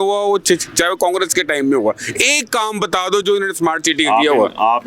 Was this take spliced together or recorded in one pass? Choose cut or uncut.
uncut